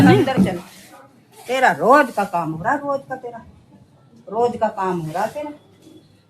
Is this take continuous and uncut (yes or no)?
yes